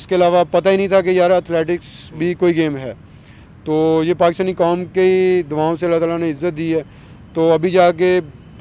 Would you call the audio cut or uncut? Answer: uncut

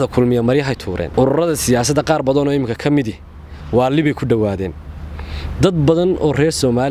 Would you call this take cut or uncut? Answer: cut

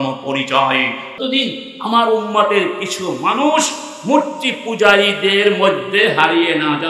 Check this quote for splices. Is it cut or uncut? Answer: cut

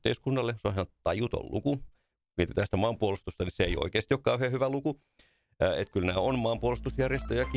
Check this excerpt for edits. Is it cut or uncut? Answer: uncut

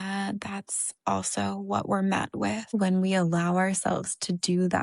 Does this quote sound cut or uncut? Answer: cut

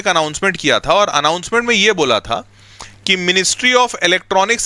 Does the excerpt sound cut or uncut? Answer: uncut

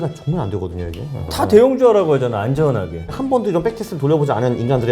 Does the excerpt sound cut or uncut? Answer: cut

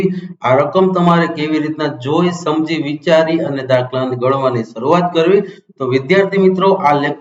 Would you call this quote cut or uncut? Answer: uncut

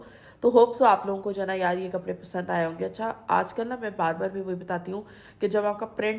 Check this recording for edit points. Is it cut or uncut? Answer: uncut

